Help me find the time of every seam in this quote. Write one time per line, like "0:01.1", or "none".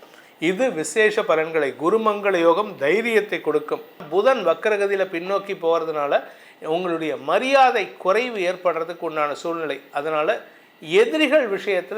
0:04.0